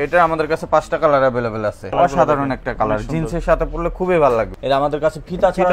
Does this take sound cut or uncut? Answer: cut